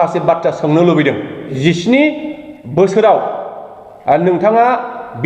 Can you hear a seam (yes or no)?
yes